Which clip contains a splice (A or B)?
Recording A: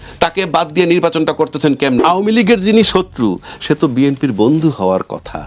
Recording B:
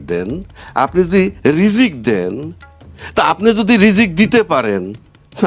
A